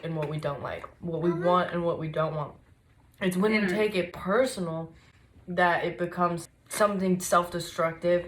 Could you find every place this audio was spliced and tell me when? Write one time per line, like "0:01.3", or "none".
0:06.4